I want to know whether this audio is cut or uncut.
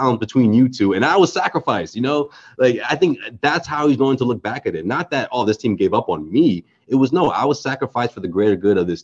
uncut